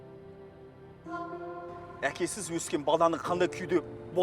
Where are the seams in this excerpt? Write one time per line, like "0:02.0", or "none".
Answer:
0:00.8
0:01.9